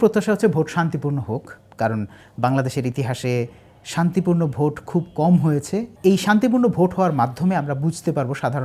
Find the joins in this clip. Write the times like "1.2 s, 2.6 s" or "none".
none